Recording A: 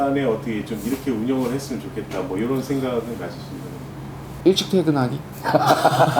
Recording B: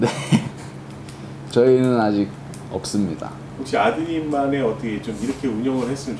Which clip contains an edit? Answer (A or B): B